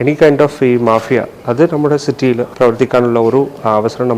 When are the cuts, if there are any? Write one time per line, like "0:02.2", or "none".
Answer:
0:02.5